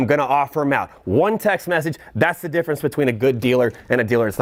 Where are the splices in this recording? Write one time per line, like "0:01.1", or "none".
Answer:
none